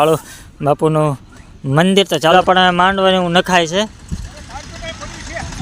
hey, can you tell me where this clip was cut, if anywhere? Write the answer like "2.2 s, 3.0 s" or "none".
2.3 s